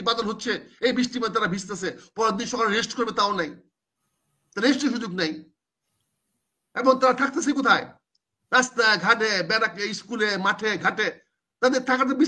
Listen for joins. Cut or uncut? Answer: uncut